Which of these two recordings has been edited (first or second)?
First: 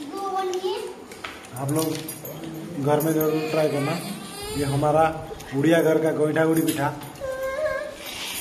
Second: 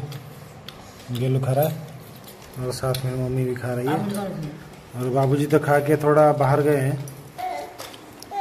second